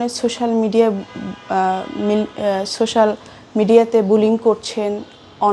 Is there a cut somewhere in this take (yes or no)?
no